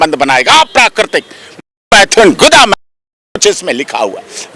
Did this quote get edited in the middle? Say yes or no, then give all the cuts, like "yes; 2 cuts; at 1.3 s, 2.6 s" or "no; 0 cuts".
no; 0 cuts